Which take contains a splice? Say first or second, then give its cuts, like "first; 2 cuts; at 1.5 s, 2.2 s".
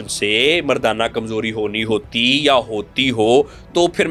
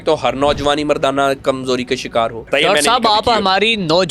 second; 1 cut; at 2.5 s